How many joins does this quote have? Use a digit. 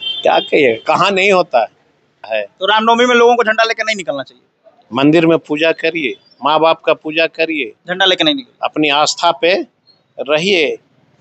1